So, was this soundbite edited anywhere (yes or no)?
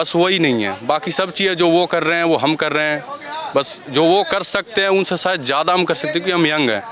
no